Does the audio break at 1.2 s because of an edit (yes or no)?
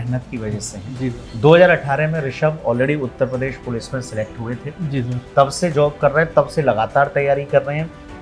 yes